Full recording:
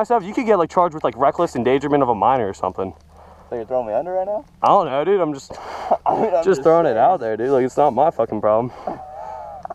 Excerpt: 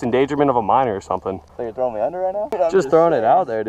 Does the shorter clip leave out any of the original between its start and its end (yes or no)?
yes